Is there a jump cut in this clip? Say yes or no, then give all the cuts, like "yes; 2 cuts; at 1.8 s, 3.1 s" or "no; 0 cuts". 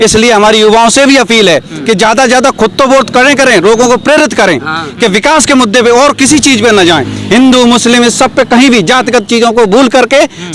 no; 0 cuts